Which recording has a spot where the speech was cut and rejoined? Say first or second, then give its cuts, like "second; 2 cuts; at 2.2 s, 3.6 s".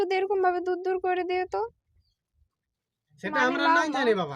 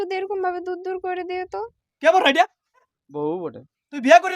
second; 2 cuts; at 1.8 s, 3.0 s